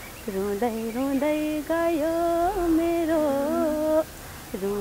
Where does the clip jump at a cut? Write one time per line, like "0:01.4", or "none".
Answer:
none